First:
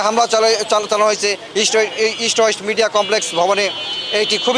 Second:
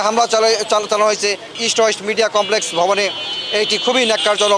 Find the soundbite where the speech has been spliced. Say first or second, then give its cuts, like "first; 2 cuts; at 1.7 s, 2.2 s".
second; 1 cut; at 1.5 s